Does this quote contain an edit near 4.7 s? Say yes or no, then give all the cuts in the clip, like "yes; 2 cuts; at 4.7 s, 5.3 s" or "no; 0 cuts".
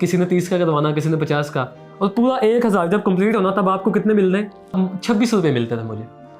yes; 1 cut; at 4.7 s